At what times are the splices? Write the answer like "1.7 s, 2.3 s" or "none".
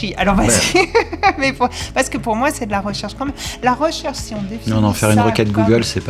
none

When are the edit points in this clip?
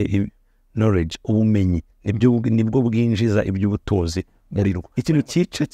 4.8 s

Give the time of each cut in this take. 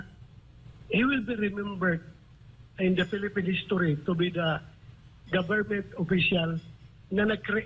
none

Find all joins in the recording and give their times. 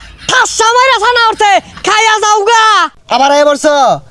2.9 s

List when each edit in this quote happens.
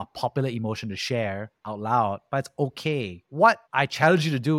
3.6 s

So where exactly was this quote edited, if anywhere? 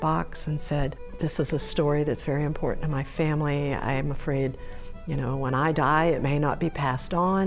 1.0 s

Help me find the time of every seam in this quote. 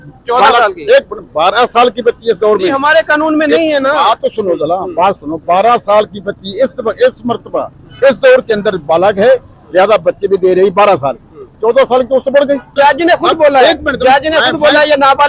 12.7 s

